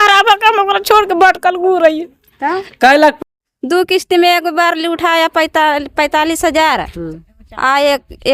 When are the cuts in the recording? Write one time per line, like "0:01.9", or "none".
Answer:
0:03.2

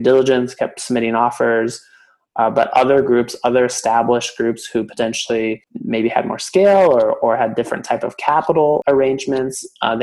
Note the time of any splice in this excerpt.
0:05.7
0:08.8

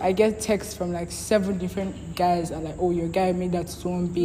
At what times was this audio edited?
none

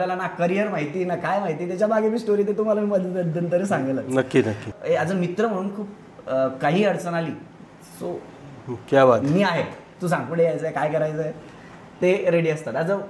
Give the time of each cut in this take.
0:04.7

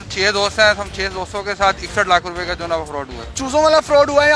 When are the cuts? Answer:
none

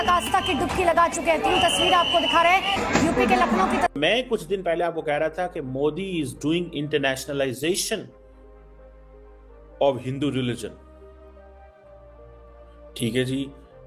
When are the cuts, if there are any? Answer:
0:04.0
0:11.2
0:12.9

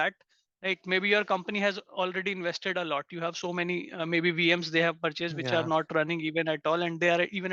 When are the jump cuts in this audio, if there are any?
none

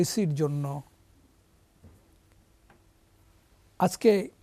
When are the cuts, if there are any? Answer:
none

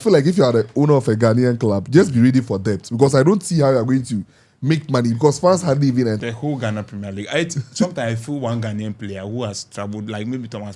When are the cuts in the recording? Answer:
0:06.2

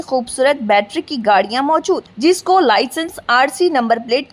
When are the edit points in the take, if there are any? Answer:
none

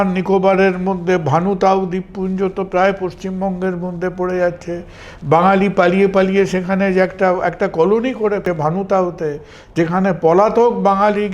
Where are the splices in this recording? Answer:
0:08.4

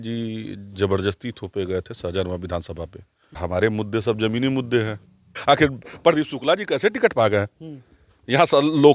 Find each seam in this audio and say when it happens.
0:03.4
0:05.4

